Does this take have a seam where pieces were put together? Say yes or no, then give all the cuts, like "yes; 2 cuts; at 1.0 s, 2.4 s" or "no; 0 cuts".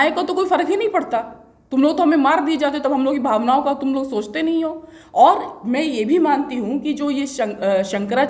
no; 0 cuts